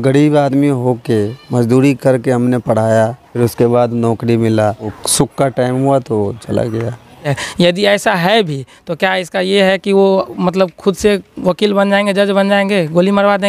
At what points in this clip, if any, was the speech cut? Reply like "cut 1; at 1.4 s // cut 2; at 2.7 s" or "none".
cut 1; at 3.2 s // cut 2; at 5.0 s // cut 3; at 7.4 s